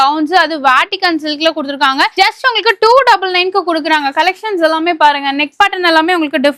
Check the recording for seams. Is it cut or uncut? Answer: uncut